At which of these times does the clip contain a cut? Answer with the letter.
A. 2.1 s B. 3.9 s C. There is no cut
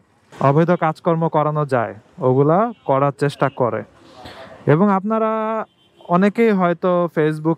C